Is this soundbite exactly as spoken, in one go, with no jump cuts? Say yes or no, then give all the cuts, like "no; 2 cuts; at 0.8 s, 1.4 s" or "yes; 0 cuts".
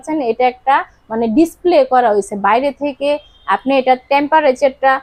yes; 0 cuts